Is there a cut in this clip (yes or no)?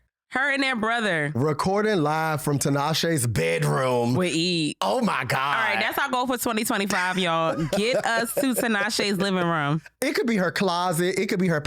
no